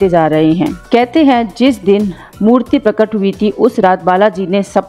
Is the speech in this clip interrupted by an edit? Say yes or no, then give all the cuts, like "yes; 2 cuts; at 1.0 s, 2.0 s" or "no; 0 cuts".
no; 0 cuts